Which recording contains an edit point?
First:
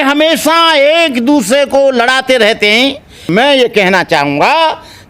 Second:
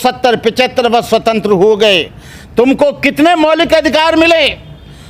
first; 1 cut; at 3.3 s

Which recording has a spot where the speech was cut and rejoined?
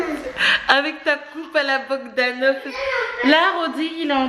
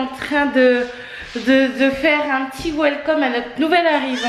first; 1 cut; at 2.7 s

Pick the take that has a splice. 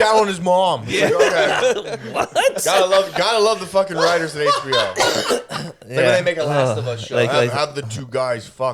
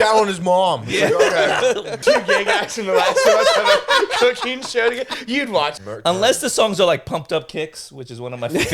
second; 2 cuts; at 2.0 s, 5.7 s

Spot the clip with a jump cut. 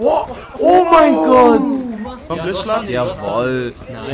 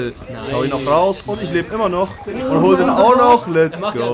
first; 1 cut; at 2.1 s

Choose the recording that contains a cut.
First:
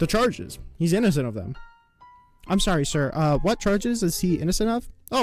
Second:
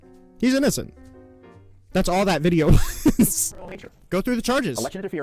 second; 1 cut; at 3.9 s

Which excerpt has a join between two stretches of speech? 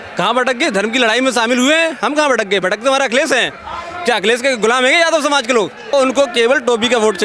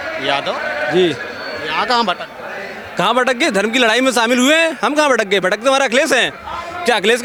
first; 1 cut; at 5.9 s

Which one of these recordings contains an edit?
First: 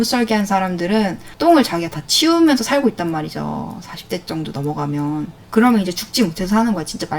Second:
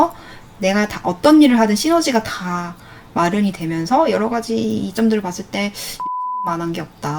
first; 1 cut; at 1.3 s

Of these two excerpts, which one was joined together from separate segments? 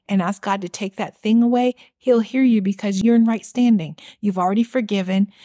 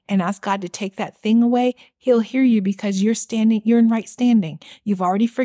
first; 1 cut; at 3.0 s

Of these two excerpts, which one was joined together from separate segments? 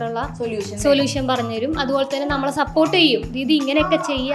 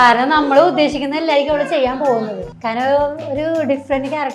second; 1 cut; at 2.5 s

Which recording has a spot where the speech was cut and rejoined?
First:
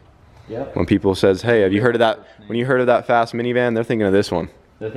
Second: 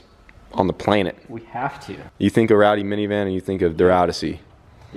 second; 1 cut; at 2.1 s

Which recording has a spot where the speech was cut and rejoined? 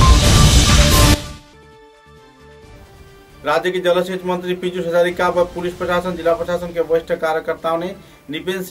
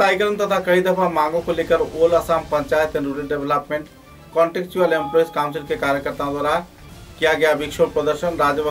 first; 1 cut; at 2.7 s

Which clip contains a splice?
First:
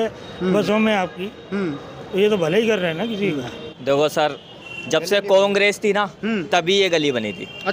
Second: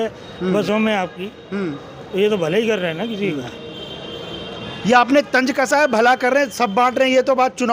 first; 1 cut; at 3.6 s

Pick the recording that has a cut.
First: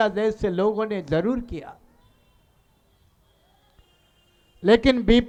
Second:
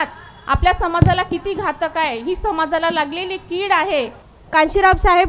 second; 1 cut; at 4.2 s

